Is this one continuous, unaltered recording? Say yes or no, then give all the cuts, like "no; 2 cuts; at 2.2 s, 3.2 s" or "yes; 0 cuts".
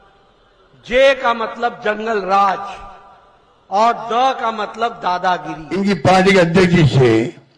no; 1 cut; at 5.8 s